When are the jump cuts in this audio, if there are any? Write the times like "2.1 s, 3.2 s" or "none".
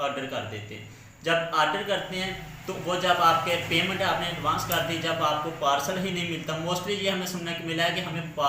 none